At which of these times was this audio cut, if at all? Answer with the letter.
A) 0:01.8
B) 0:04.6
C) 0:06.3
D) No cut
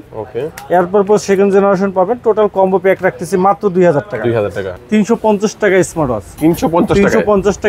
B